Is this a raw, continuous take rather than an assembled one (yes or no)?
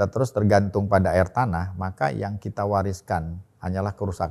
yes